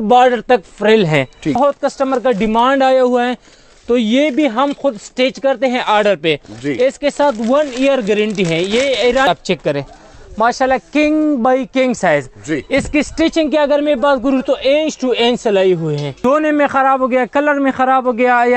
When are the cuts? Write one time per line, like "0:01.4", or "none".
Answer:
0:01.6
0:09.3
0:16.1